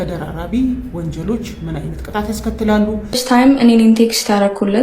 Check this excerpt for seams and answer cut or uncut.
cut